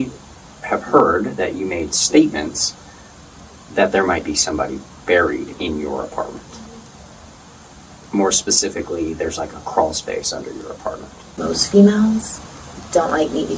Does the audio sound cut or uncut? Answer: cut